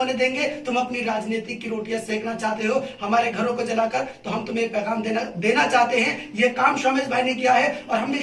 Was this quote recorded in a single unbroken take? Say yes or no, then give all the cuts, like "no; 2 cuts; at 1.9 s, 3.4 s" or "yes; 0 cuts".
yes; 0 cuts